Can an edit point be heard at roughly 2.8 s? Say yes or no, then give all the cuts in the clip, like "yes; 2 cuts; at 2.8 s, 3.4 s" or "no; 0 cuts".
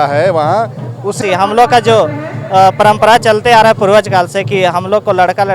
no; 1 cut; at 1.2 s